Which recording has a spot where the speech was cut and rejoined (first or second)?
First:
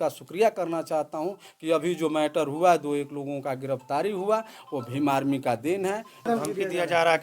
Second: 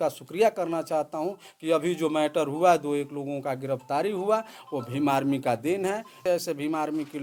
first